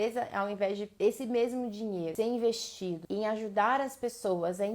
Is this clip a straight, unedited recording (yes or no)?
no